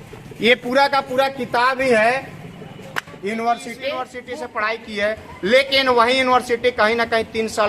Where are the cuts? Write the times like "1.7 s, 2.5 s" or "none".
4.2 s